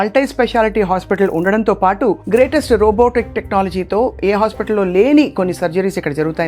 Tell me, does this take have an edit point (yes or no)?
no